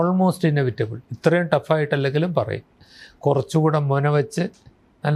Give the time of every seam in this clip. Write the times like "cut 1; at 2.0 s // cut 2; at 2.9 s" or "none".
none